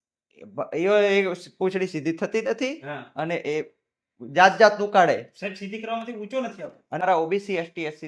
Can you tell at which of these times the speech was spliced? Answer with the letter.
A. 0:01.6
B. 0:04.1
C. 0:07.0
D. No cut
C